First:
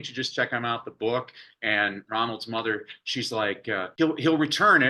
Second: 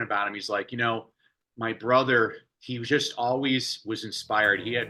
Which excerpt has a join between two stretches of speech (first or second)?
first